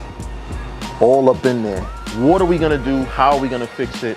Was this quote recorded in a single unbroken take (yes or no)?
no